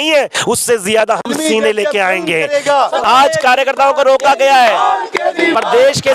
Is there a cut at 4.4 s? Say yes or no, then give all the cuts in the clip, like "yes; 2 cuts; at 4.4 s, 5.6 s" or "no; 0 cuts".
no; 1 cut; at 3.0 s